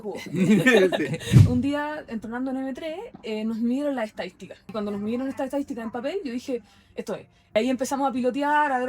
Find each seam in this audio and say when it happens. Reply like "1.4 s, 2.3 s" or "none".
1.4 s, 4.7 s, 7.5 s